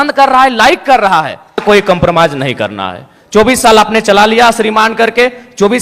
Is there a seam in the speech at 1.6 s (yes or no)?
yes